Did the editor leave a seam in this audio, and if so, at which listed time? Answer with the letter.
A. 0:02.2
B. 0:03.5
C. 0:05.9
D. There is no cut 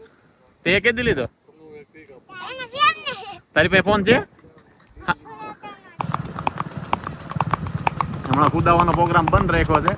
C